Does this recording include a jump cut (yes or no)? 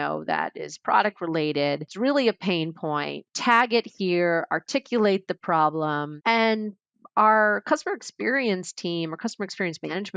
yes